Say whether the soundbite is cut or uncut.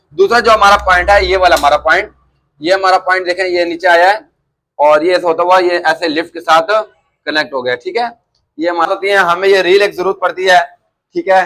cut